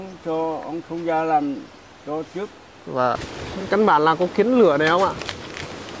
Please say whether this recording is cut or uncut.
cut